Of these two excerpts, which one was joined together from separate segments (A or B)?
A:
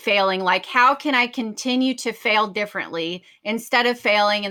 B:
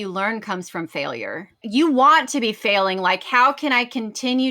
B